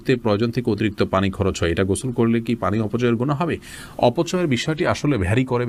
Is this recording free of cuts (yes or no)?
yes